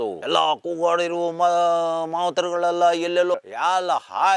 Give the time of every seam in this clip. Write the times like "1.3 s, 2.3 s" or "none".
3.3 s